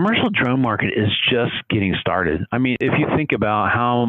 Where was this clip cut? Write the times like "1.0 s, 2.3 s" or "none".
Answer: 2.8 s